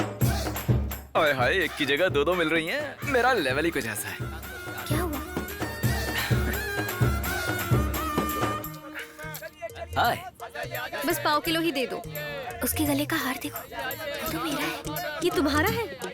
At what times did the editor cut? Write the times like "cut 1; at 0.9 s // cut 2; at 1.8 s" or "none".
none